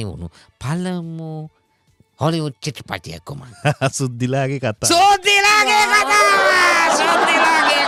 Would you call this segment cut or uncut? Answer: uncut